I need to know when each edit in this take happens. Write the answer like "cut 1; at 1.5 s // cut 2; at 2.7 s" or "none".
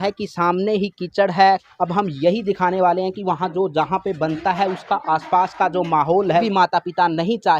cut 1; at 1.7 s // cut 2; at 6.5 s